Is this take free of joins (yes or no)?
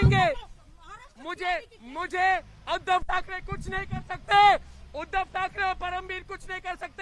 yes